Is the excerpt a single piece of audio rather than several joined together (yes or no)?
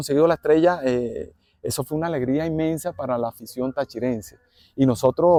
yes